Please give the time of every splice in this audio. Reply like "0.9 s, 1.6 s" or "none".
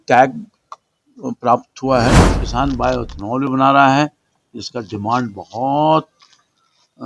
2.3 s